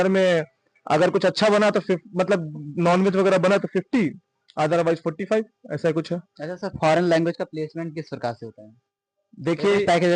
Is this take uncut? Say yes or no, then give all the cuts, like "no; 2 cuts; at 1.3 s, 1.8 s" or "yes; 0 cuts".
yes; 0 cuts